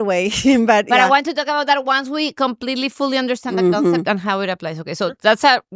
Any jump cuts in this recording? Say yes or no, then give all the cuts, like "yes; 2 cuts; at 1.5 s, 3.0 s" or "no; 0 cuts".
no; 0 cuts